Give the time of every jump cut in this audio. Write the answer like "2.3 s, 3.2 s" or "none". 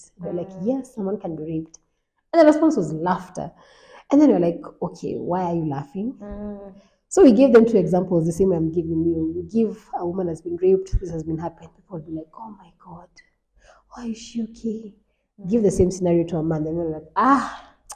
none